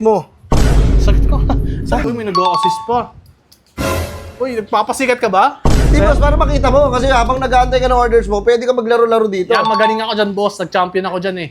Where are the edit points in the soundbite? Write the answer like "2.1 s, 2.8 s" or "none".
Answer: 2.1 s